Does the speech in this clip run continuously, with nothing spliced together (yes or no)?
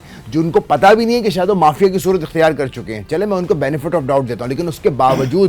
yes